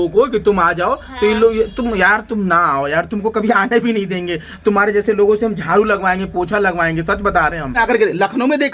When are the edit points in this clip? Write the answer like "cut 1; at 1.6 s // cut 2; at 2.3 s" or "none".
cut 1; at 7.8 s